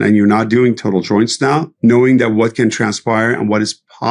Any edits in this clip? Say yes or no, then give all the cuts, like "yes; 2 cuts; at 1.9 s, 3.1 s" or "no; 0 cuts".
yes; 1 cut; at 1.7 s